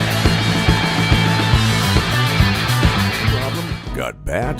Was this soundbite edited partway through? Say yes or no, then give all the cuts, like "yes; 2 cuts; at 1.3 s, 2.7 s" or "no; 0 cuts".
yes; 1 cut; at 3.5 s